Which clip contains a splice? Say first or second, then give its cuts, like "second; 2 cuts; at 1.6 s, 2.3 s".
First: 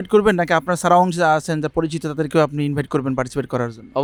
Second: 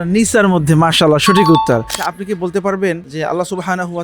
second; 2 cuts; at 1.9 s, 3.1 s